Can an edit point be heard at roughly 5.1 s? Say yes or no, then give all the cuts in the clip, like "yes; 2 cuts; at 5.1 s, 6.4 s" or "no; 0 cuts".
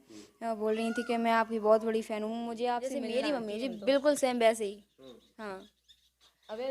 no; 1 cut; at 2.9 s